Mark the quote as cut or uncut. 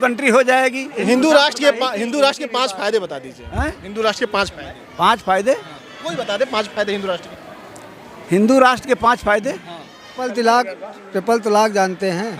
cut